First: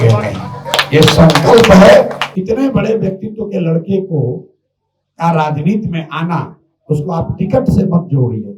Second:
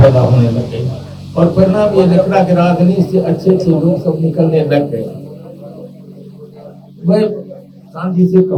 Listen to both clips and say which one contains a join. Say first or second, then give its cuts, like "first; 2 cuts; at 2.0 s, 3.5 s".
first; 1 cut; at 2.2 s